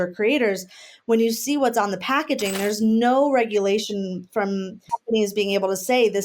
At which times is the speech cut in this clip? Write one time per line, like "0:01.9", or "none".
0:04.8

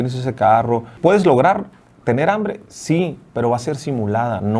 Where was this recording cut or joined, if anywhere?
0:01.0

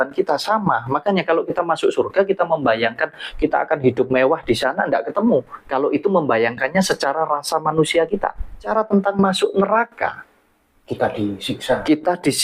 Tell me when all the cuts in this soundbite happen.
0:08.7

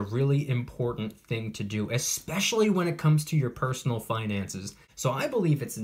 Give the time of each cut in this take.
0:04.8

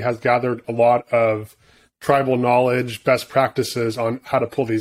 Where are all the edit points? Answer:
none

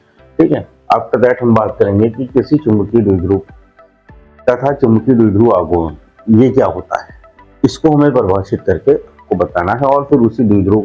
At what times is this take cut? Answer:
none

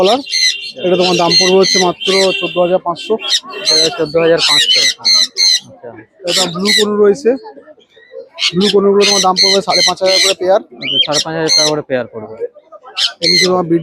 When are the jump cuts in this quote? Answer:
none

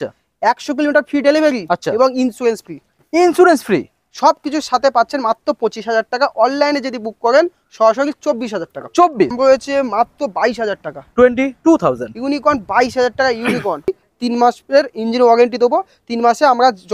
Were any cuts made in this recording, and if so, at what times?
0:09.3
0:13.9

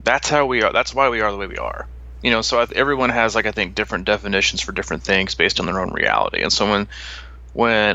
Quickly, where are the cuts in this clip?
none

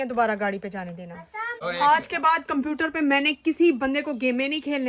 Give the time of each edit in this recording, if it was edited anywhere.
0:01.6

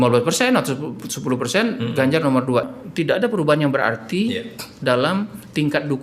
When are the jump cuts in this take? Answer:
0:02.7

